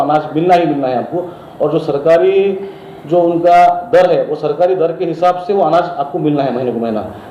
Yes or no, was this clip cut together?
no